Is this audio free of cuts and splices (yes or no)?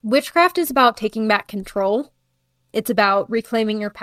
yes